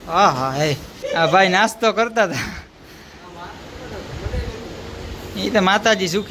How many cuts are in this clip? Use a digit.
1